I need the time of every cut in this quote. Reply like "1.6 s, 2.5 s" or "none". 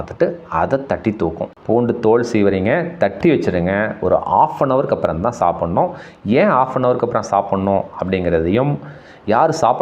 1.5 s